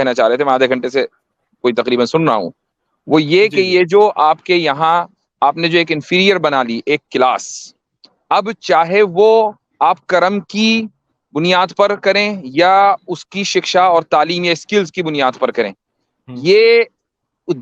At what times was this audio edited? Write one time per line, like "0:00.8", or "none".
none